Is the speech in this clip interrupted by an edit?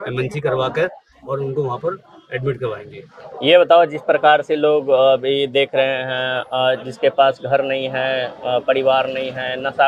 no; 0 cuts

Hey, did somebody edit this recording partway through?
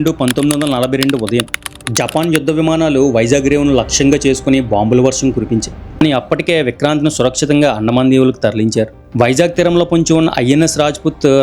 yes; 2 cuts; at 6.0 s, 9.0 s

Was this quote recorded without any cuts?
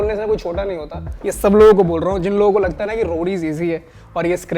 no; 1 cut; at 1.0 s

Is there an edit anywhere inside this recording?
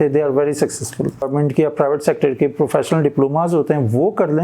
yes; 1 cut; at 1.3 s

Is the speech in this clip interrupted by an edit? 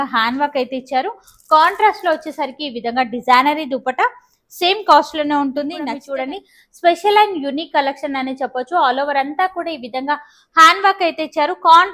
yes; 1 cut; at 6.0 s

